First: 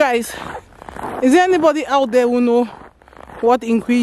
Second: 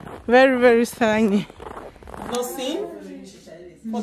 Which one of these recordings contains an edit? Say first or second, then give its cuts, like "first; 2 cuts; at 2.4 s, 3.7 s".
second; 1 cut; at 2.2 s